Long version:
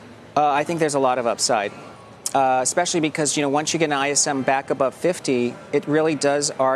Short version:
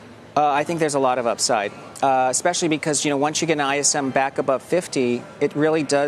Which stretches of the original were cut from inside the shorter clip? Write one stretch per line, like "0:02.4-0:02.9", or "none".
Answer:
0:01.8-0:02.1